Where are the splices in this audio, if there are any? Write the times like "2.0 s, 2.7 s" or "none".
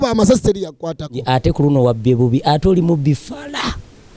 1.2 s